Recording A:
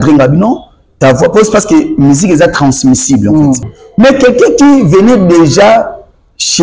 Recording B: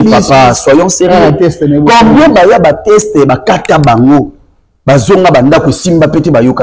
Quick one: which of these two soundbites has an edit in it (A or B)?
A